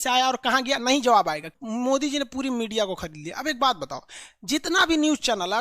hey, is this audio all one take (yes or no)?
no